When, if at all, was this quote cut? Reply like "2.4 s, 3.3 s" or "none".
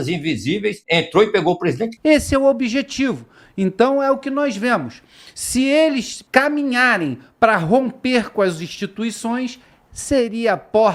0.8 s, 1.9 s, 6.2 s